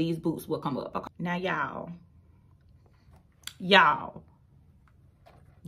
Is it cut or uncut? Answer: cut